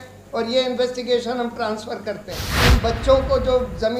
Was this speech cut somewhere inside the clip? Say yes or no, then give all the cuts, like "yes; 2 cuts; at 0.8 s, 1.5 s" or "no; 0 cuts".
yes; 1 cut; at 2.5 s